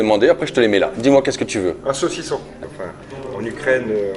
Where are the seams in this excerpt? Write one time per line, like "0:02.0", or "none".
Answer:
0:02.7